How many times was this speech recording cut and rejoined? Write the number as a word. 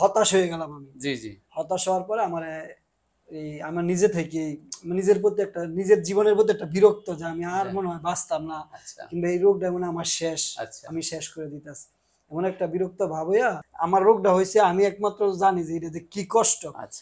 one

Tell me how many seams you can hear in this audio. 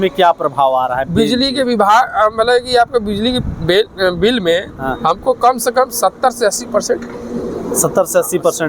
zero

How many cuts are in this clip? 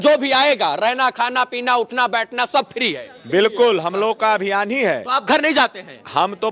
zero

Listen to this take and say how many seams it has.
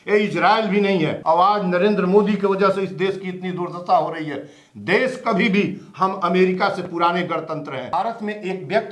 two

